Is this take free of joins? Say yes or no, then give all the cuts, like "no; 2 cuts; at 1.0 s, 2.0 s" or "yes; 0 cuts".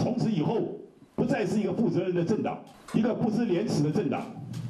no; 1 cut; at 2.7 s